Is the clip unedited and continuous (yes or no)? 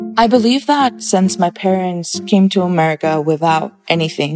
no